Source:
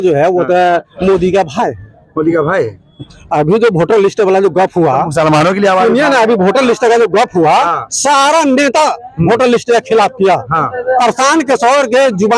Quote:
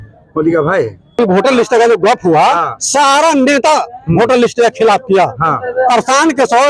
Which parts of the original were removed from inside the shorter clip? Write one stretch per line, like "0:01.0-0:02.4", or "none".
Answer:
0:03.0-0:06.3